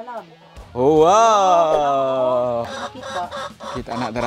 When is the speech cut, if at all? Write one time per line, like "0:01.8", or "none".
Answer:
0:02.8